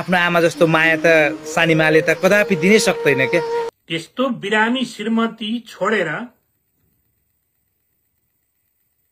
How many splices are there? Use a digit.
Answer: 1